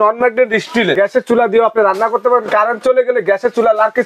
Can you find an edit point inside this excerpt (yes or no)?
yes